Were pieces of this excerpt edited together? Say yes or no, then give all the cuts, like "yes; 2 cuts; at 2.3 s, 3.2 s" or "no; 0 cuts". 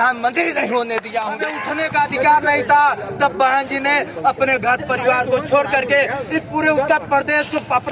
yes; 1 cut; at 1.6 s